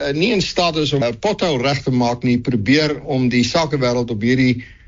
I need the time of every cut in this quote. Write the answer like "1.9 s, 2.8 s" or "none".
1.0 s

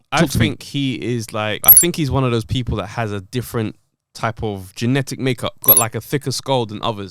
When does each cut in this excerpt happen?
1.7 s, 5.6 s

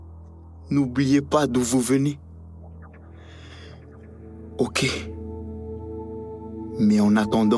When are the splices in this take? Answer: none

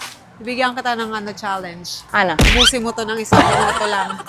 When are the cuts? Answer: none

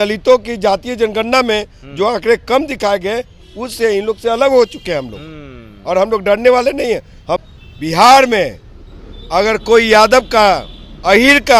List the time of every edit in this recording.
7.4 s

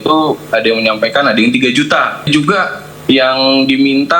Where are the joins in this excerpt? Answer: 2.3 s

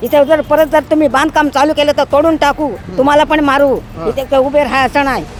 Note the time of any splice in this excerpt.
none

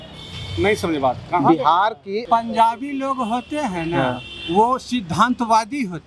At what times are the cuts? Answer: 2.2 s

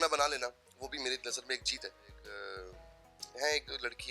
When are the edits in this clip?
2.3 s

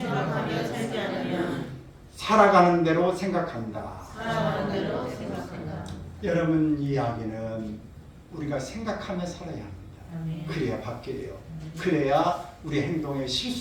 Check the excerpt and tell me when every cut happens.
none

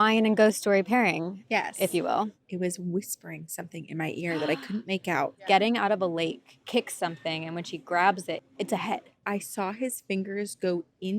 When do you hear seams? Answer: 2.4 s, 5.4 s, 6.5 s, 8.6 s

